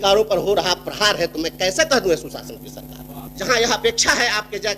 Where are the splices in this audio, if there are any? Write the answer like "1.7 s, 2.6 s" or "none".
3.2 s